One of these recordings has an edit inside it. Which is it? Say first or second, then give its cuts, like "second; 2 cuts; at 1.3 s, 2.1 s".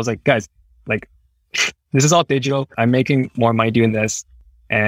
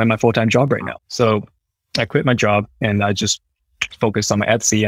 second; 2 cuts; at 1.5 s, 2.8 s